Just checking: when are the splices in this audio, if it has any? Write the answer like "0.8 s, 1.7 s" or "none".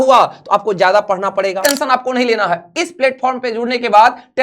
1.6 s